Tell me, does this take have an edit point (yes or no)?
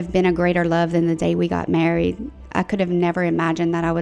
no